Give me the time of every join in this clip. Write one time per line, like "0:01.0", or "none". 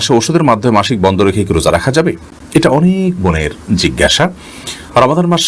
none